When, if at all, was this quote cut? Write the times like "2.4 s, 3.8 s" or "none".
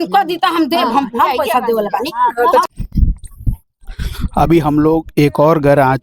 2.6 s